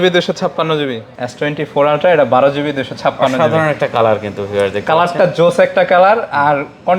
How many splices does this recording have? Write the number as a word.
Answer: one